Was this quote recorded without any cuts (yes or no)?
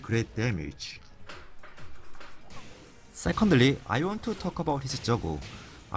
yes